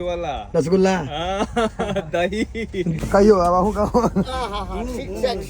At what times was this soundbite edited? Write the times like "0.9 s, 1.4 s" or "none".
2.9 s